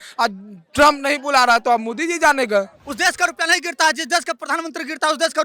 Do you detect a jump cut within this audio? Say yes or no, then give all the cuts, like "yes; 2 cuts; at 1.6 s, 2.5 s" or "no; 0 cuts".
yes; 1 cut; at 2.8 s